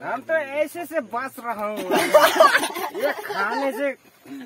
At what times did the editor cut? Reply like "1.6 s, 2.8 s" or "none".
1.0 s